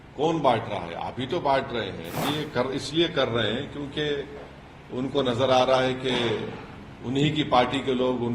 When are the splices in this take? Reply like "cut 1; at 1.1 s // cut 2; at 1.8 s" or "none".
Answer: cut 1; at 2.2 s